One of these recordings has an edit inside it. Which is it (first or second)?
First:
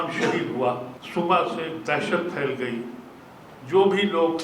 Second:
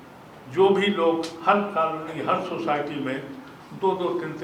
first